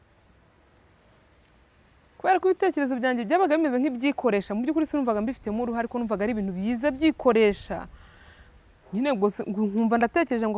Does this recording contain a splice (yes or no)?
no